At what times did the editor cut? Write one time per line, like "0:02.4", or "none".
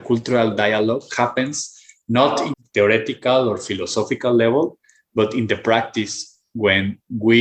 0:02.5